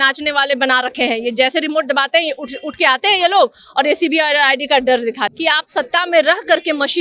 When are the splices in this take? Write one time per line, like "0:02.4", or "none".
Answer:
0:05.3